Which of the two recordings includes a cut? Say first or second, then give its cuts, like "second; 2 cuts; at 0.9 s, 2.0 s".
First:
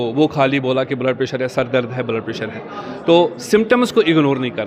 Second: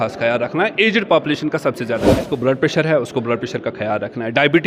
second; 1 cut; at 2.2 s